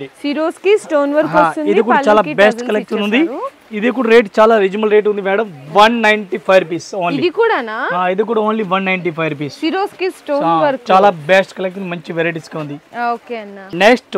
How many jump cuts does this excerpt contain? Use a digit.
0